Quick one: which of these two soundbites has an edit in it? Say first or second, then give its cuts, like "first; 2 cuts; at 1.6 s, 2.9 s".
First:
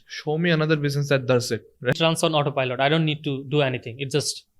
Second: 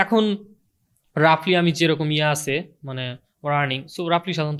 first; 1 cut; at 1.9 s